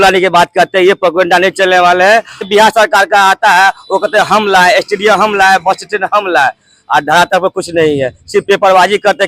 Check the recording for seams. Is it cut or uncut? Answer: cut